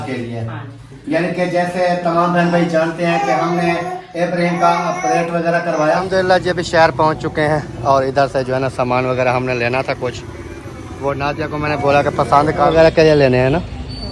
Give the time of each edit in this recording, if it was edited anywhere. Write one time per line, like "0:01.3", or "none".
0:06.0
0:12.7